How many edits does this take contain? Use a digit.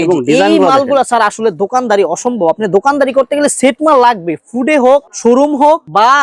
0